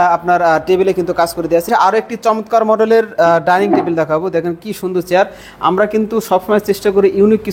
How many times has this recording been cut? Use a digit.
1